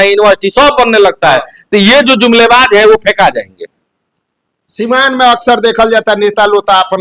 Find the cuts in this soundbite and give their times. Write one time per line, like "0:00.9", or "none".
none